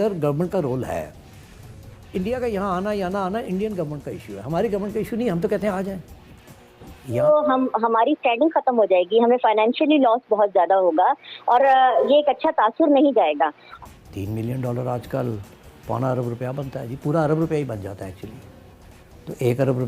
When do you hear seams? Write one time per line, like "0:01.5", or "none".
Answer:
0:07.2
0:13.6